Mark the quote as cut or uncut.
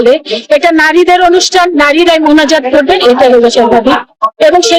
uncut